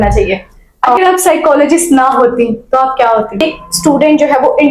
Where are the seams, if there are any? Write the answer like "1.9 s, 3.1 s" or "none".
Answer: 1.0 s, 3.4 s